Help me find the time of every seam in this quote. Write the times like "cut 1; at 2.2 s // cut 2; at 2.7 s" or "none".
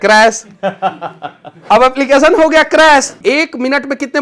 cut 1; at 3.1 s